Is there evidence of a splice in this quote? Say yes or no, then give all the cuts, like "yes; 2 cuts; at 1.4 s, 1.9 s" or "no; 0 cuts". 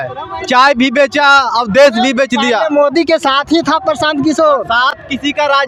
no; 0 cuts